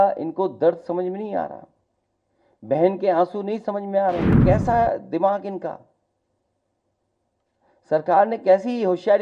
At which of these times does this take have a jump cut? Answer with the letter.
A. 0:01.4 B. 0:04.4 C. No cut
B